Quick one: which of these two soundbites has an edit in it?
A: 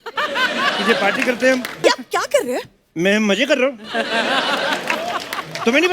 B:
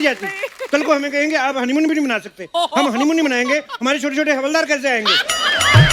A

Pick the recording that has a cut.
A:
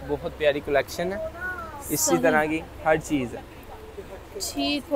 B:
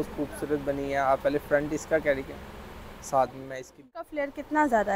B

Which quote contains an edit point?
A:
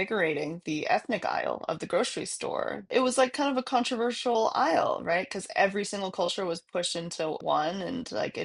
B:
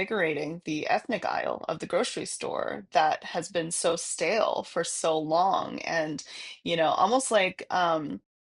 A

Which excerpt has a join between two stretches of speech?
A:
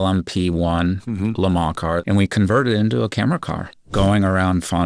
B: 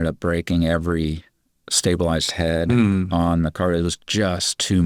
A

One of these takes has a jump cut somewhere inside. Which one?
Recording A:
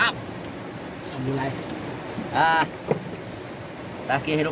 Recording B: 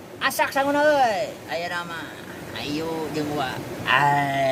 A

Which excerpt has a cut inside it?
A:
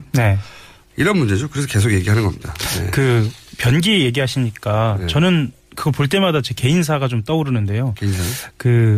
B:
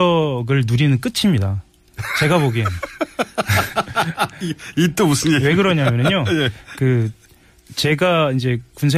A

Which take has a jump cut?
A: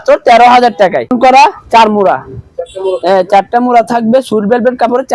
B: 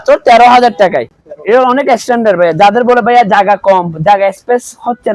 A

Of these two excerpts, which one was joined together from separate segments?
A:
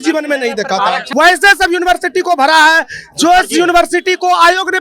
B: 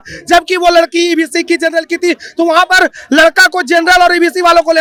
A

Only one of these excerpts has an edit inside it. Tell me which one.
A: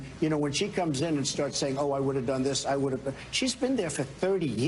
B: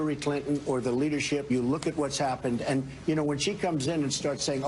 B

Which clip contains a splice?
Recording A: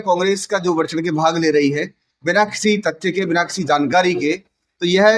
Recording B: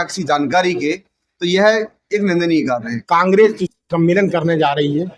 B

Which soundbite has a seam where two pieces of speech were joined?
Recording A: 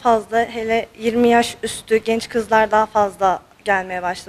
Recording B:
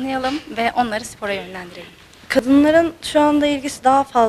B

